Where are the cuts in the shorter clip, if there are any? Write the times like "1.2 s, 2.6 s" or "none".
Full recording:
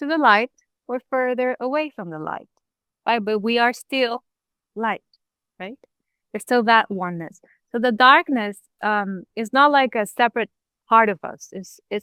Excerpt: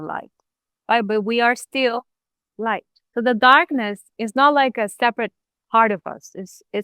2.9 s, 4.1 s